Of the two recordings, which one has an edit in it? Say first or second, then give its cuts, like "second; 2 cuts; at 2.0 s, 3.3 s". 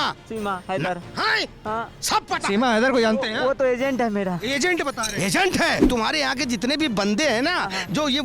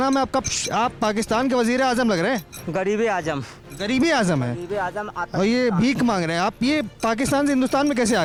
first; 1 cut; at 5.8 s